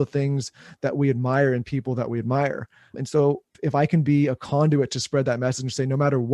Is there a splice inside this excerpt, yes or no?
yes